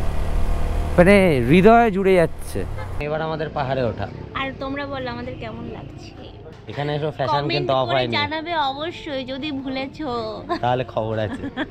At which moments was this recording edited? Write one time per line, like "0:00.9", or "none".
0:03.0
0:06.5